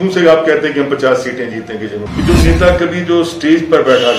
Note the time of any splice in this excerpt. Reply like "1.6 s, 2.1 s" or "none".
2.0 s